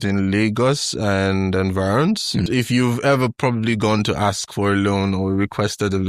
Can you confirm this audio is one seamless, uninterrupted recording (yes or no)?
no